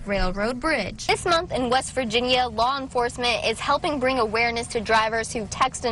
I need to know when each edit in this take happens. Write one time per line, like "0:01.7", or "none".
0:01.1